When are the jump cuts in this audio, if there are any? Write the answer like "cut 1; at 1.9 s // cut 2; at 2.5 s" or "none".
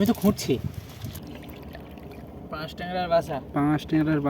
cut 1; at 1.2 s